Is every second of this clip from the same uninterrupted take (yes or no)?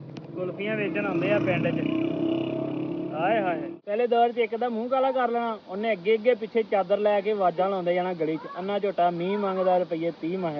no